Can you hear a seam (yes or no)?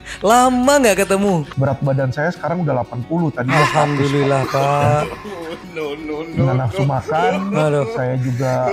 yes